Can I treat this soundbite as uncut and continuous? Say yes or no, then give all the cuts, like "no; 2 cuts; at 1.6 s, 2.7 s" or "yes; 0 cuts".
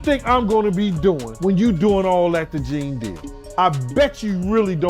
no; 2 cuts; at 1.3 s, 3.5 s